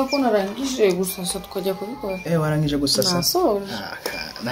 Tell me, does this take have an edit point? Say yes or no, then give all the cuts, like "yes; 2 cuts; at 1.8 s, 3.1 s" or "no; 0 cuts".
no; 0 cuts